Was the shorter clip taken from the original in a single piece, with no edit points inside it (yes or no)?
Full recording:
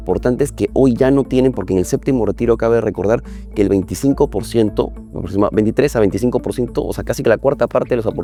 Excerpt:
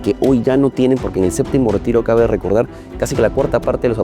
no